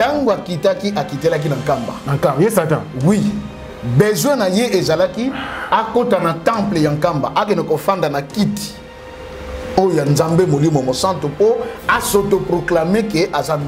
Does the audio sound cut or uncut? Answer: uncut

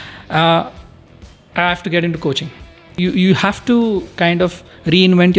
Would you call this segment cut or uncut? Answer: cut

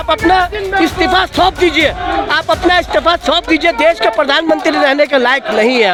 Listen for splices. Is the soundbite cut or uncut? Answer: uncut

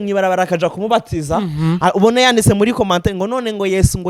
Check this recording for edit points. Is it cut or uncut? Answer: uncut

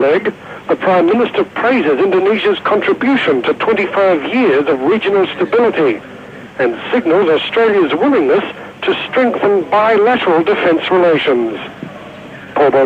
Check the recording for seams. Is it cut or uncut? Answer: uncut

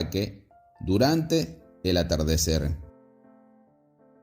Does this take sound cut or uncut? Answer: cut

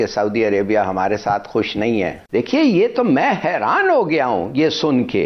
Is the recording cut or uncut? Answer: cut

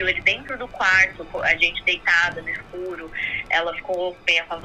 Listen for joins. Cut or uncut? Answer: uncut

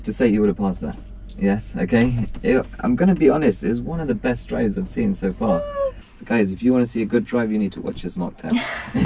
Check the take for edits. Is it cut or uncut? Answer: cut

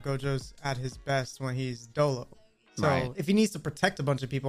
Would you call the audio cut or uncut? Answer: cut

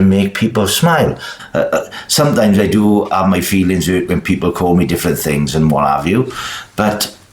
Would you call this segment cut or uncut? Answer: cut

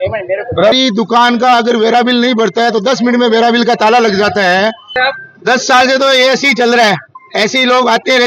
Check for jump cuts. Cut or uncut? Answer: cut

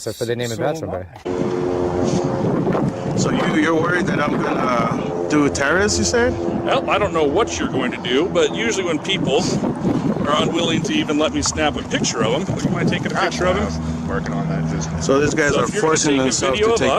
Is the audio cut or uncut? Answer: cut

